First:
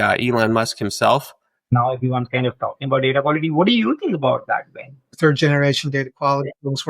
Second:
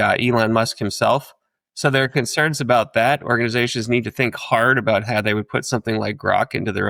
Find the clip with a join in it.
first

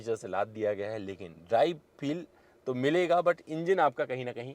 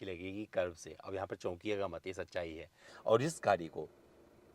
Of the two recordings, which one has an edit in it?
second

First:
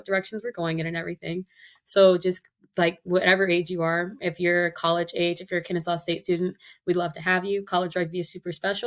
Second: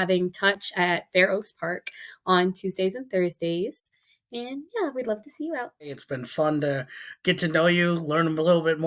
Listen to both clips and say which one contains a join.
second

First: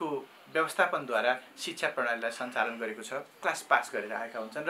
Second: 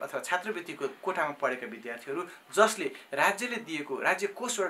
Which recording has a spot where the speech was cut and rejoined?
first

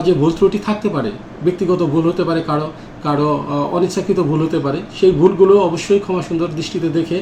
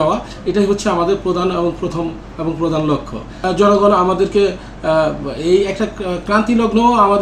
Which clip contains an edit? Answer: second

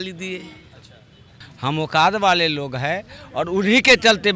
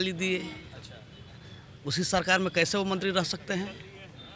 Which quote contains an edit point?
first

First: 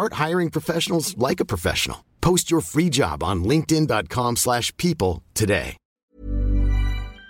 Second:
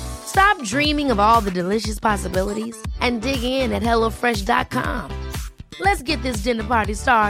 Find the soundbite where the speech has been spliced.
first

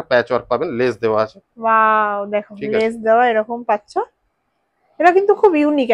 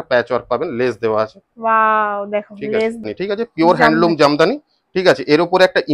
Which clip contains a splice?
second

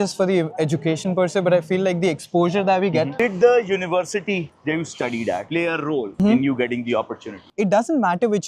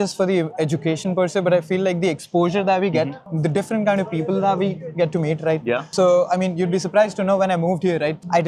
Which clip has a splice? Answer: first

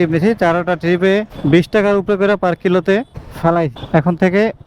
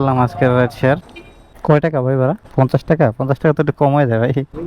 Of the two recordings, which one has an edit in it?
second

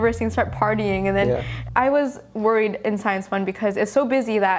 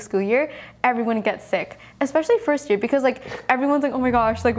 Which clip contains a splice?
first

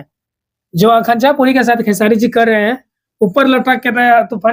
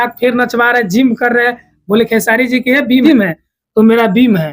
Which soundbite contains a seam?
second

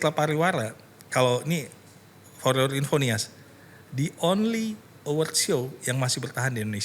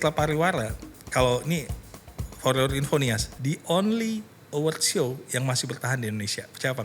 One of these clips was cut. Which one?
second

